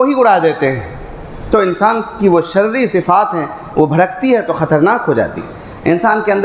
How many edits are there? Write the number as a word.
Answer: zero